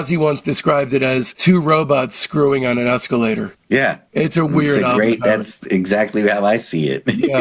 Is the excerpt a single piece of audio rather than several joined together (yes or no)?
yes